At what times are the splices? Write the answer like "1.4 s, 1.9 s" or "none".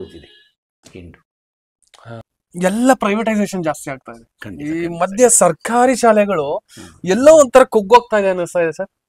2.2 s